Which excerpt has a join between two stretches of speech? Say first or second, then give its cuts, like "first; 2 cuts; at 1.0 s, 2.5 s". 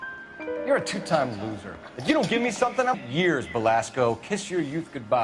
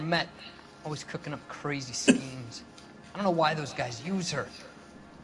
first; 2 cuts; at 0.7 s, 3.0 s